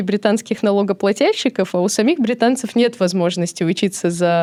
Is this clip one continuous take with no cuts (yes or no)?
yes